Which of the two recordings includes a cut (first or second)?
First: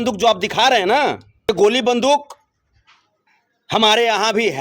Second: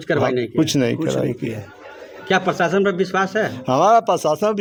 first